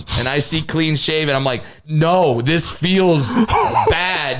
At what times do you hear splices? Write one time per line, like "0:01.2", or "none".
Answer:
0:01.7